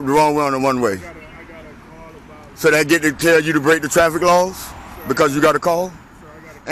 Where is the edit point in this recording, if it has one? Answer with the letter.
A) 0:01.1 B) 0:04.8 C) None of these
C